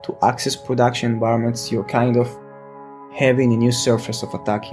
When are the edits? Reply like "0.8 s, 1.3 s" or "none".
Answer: 3.0 s